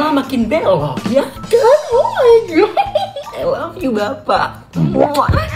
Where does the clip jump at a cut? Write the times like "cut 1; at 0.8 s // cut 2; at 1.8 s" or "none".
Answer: cut 1; at 3.3 s